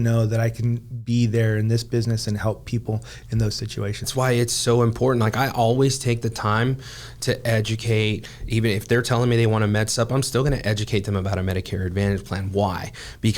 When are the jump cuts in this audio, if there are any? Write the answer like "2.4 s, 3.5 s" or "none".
4.1 s